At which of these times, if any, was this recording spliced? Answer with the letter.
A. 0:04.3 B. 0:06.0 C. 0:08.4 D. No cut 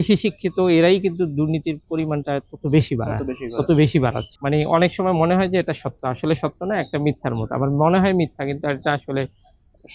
A